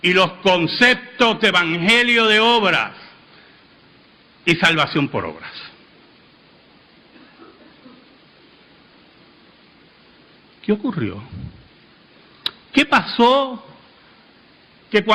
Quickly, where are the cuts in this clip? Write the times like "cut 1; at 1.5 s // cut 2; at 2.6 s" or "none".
none